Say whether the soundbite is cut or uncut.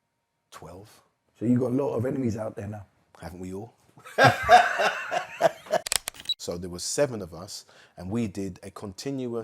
cut